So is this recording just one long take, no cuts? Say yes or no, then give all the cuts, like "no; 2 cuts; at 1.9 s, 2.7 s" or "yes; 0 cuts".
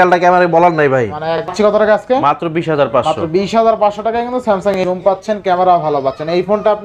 no; 2 cuts; at 1.5 s, 4.8 s